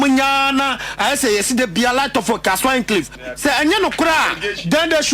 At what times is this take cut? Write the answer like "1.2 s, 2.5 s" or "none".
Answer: 3.2 s